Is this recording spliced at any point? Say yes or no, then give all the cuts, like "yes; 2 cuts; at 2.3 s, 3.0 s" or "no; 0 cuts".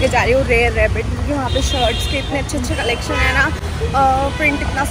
no; 0 cuts